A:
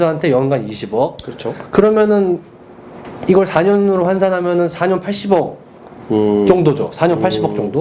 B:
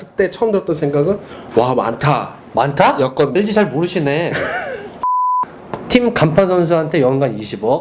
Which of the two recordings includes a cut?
B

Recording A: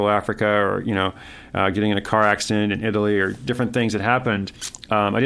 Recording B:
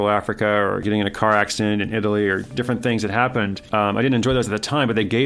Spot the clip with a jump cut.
B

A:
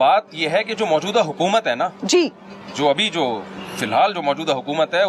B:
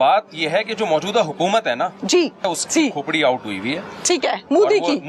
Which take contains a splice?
B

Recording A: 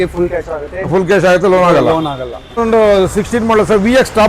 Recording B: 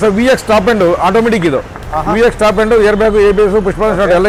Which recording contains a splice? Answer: A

